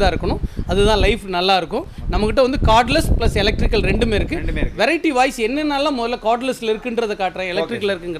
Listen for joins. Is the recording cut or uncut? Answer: uncut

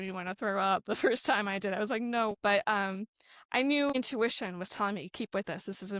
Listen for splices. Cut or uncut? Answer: cut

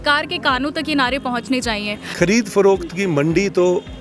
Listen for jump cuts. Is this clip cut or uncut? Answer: cut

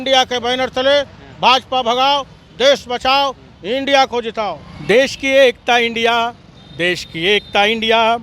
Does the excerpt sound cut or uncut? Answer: cut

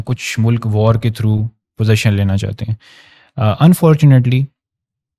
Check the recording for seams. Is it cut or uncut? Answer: uncut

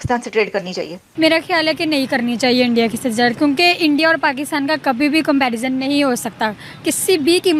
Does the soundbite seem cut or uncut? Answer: cut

